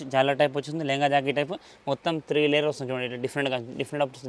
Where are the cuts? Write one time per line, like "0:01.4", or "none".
none